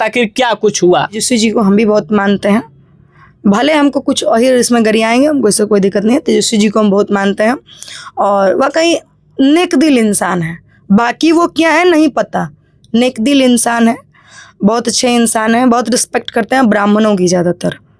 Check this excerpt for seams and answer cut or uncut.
cut